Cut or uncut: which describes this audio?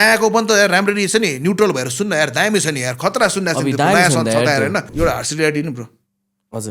cut